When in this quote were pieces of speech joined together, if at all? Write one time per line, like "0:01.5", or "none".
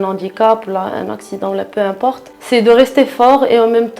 0:02.3